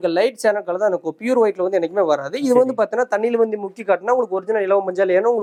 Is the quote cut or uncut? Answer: uncut